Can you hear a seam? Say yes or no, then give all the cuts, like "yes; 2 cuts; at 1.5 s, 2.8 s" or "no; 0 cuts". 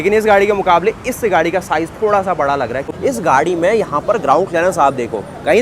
yes; 1 cut; at 2.9 s